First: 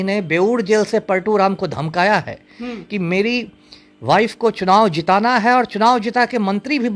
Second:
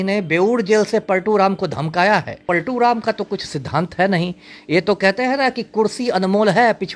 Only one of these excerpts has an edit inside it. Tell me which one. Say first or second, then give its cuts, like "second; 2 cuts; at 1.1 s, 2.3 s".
second; 1 cut; at 2.4 s